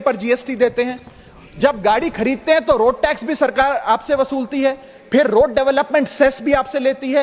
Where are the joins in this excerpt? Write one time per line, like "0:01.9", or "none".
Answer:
none